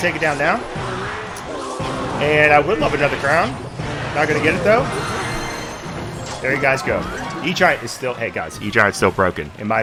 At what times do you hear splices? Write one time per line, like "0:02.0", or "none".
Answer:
none